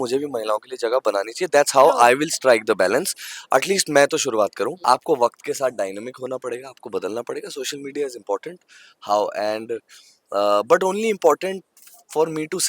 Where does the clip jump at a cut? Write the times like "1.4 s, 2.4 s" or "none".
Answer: 4.8 s